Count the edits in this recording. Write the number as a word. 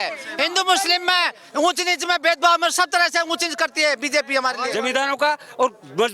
one